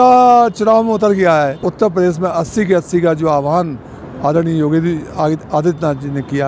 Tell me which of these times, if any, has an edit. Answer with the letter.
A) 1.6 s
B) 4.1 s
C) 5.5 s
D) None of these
A